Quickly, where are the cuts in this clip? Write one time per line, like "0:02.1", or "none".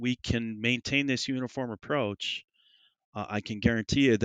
none